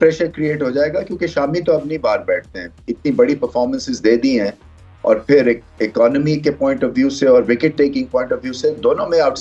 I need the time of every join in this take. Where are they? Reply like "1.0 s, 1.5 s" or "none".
none

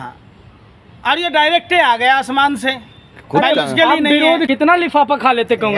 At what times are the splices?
4.5 s

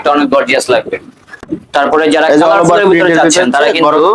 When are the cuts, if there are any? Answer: 1.4 s

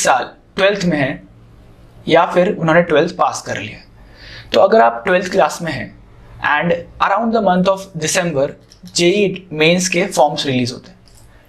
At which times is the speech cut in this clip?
none

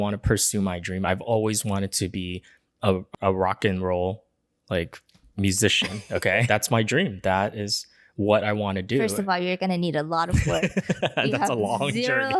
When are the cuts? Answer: 3.1 s, 6.4 s

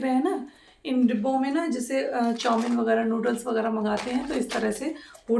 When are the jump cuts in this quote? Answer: none

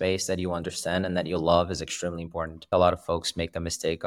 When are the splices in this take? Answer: 2.6 s

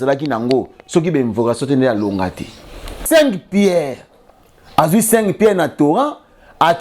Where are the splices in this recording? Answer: 3.0 s

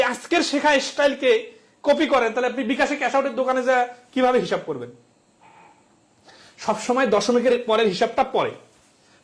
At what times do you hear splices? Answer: none

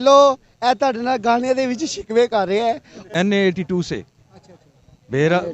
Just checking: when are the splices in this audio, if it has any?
2.9 s

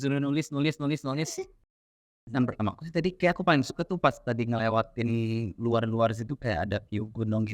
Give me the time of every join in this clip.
1.7 s

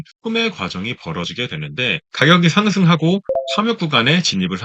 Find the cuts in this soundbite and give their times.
2.0 s

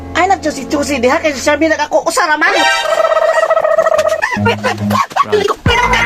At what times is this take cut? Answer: none

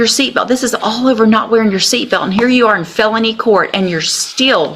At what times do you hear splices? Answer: none

